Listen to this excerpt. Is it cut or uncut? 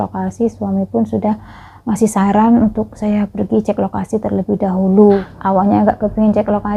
cut